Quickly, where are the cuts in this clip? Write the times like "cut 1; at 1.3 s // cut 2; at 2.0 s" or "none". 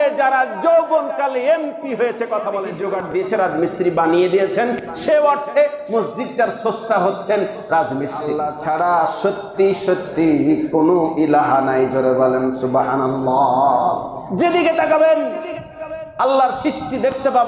cut 1; at 2.8 s // cut 2; at 8.3 s